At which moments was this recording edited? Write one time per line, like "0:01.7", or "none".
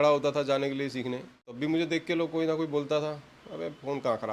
0:01.6